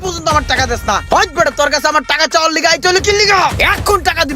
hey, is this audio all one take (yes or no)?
no